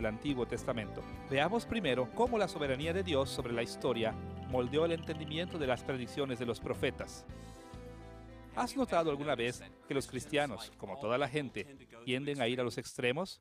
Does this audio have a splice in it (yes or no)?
no